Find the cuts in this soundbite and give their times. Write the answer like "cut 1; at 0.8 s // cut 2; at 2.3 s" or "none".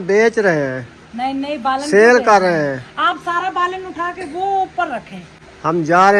none